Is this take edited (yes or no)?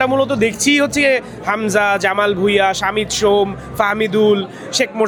no